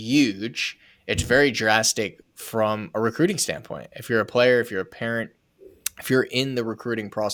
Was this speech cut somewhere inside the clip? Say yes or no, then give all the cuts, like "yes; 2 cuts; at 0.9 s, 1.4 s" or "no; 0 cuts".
no; 0 cuts